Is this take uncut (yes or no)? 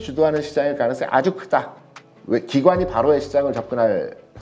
yes